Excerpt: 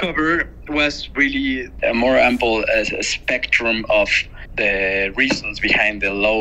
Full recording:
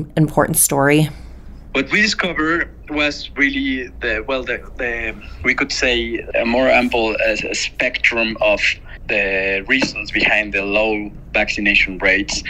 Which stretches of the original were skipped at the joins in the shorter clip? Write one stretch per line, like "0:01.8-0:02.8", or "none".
0:03.9-0:06.3

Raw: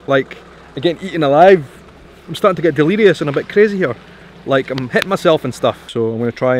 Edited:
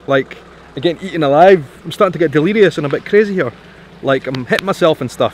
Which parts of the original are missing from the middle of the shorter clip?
0:01.8-0:02.2

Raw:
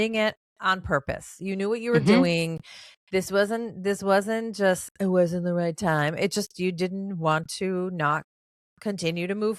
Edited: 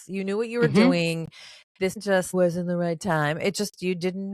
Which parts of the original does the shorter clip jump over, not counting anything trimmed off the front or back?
0:03.3-0:04.8

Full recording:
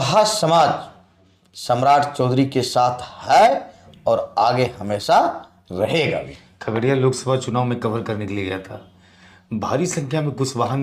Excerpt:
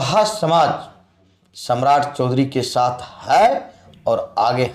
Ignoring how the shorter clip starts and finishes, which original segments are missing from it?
none

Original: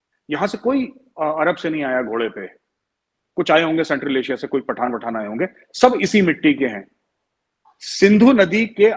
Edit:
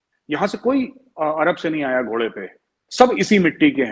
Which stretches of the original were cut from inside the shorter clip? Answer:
0:02.8-0:05.6

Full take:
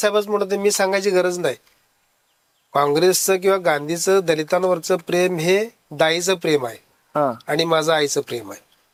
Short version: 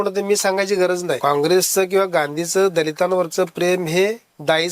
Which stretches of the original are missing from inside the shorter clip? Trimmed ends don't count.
0:01.5-0:02.7

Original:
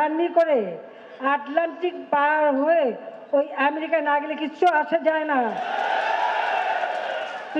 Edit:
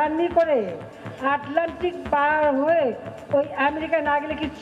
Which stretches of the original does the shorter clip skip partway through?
none

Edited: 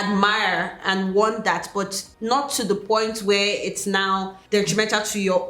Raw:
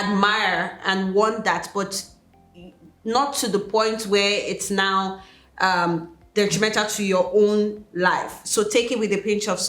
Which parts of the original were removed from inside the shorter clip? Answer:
0:02.0-0:02.9
0:05.2-0:06.2

